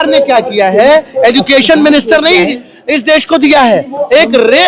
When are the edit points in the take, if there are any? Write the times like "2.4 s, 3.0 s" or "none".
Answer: none